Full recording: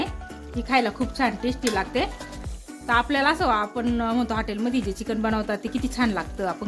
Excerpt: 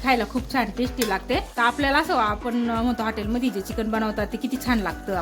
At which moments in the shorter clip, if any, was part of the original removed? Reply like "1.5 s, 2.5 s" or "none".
1.5 s